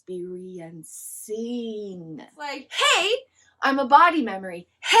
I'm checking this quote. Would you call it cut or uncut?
cut